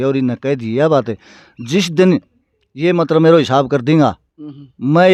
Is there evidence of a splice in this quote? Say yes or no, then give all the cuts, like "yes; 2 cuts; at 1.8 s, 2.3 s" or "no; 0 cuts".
no; 0 cuts